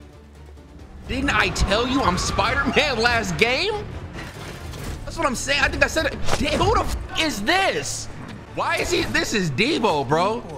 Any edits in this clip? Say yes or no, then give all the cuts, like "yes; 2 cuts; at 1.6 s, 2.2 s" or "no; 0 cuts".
yes; 1 cut; at 8.4 s